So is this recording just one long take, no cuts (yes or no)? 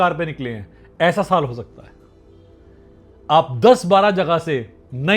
yes